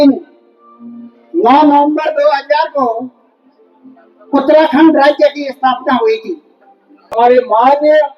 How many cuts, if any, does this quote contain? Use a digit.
1